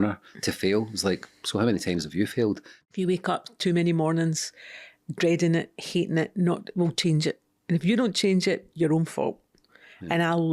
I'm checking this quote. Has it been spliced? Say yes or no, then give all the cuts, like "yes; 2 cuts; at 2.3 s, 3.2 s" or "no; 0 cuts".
yes; 1 cut; at 2.8 s